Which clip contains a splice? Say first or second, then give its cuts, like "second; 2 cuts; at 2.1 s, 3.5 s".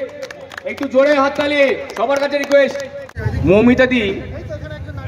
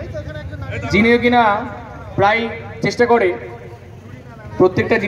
first; 1 cut; at 3.1 s